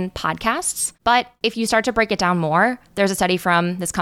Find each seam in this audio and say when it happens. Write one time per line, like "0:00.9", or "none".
0:01.2